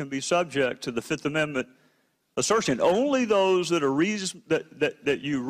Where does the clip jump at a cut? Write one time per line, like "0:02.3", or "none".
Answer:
0:01.8